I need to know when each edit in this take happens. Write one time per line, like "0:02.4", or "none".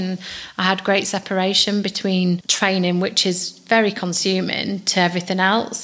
0:02.5